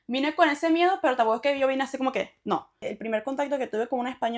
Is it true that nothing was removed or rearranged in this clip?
no; 1 cut; at 2.9 s

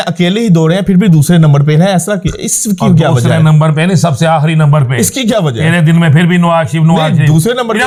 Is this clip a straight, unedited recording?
yes; 0 cuts

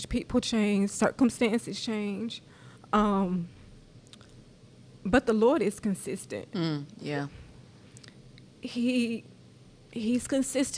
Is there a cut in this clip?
no; 0 cuts

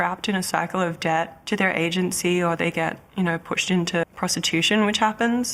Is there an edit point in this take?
yes; 2 cuts; at 1.4 s, 4.0 s

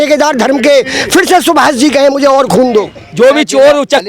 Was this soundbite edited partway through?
yes; 1 cut; at 3.0 s

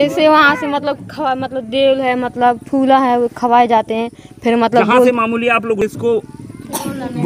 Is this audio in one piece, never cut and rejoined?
yes; 0 cuts

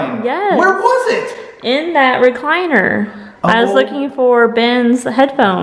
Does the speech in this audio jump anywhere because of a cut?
no; 0 cuts

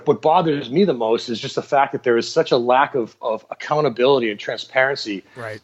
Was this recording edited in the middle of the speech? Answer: no; 0 cuts

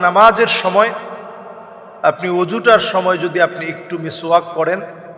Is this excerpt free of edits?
yes; 0 cuts

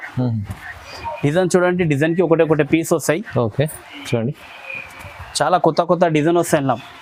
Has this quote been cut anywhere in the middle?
no; 0 cuts

